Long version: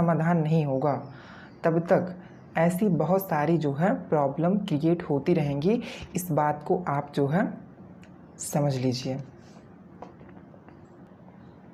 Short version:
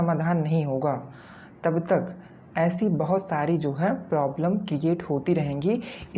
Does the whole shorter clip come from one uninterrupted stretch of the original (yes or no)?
yes